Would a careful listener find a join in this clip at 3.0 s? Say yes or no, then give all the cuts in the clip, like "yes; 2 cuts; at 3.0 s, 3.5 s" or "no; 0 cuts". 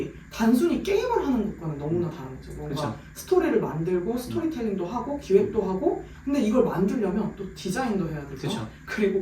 no; 0 cuts